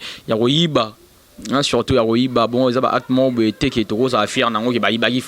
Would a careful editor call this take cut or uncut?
uncut